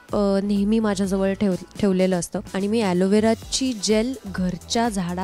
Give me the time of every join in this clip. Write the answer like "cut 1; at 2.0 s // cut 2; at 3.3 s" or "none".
cut 1; at 2.5 s